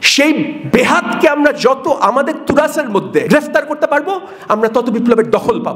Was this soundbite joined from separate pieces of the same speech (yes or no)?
yes